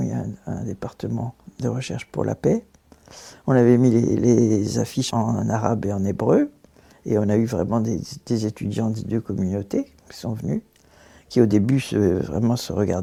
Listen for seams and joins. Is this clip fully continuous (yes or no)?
yes